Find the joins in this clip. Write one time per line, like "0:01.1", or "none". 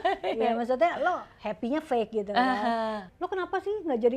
0:03.1